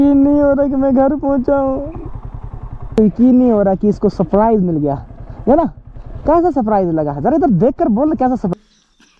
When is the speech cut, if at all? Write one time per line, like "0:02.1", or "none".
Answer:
0:03.0
0:08.5